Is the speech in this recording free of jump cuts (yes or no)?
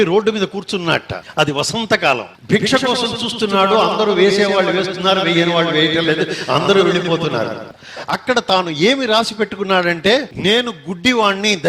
no